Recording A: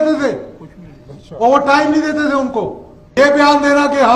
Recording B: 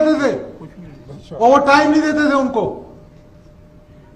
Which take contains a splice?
A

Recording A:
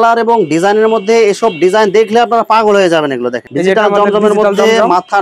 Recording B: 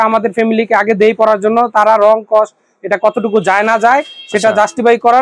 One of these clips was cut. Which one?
A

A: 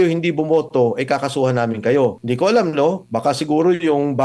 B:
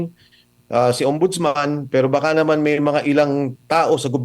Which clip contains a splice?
A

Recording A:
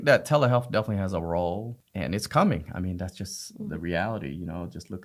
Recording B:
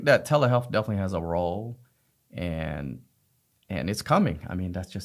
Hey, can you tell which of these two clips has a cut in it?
A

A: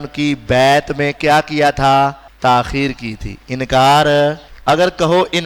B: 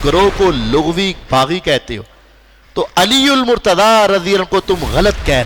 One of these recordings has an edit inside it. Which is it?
A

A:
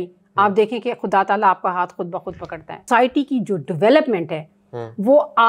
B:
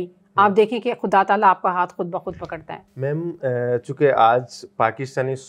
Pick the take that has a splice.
A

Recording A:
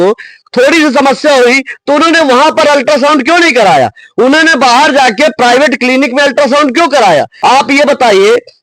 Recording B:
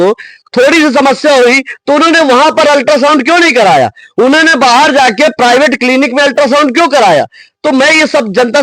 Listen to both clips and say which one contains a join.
A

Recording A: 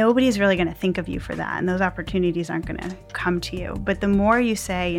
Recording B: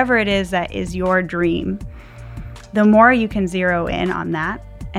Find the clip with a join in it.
A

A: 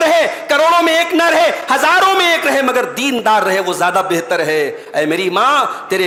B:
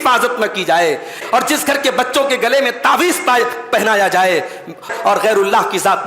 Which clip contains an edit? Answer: B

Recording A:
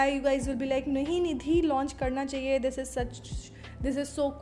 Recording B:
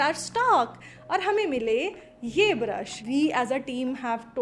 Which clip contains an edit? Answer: B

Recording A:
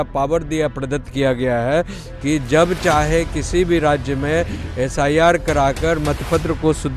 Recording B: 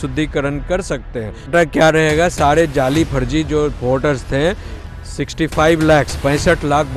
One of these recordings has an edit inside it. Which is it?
B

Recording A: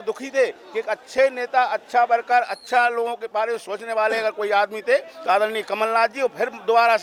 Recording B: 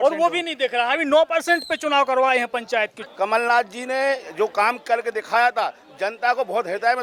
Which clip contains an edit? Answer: B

